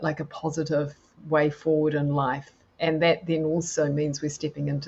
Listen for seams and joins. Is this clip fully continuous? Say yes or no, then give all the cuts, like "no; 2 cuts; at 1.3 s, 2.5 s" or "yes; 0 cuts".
yes; 0 cuts